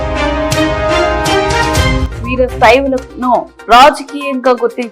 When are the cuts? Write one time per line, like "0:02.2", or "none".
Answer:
0:02.1